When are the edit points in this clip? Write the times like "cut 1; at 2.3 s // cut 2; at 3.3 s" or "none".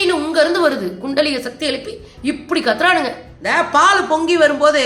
cut 1; at 3.3 s